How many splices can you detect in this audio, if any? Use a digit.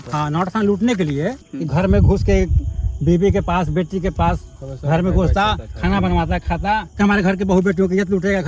2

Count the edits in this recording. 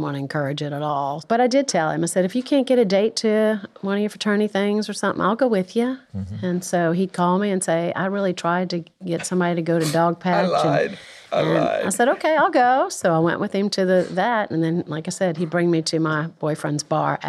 1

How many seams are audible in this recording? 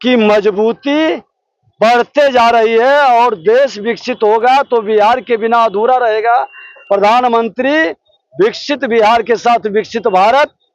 0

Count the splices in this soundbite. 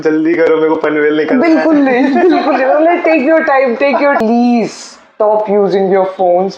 1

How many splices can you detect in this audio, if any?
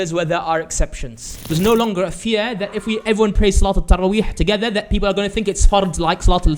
1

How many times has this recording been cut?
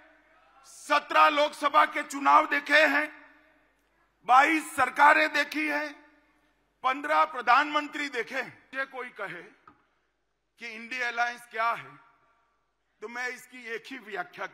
1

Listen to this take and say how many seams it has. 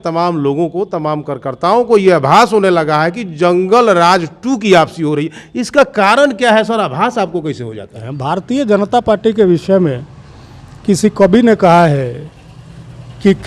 1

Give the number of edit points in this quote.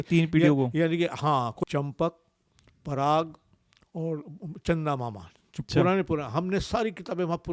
1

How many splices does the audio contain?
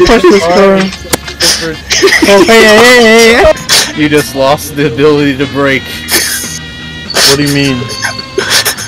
1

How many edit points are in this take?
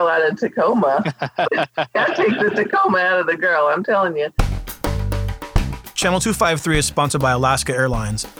1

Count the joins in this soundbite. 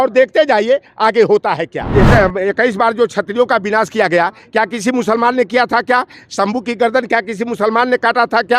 1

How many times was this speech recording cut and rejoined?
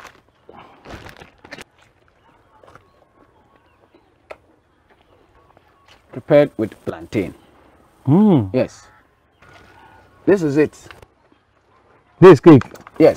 2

